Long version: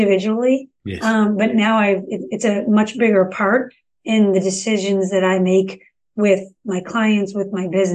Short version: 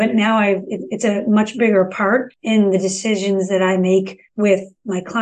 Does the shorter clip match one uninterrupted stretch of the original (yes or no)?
no